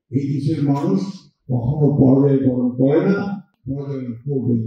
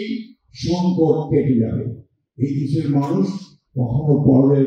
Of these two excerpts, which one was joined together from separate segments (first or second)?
first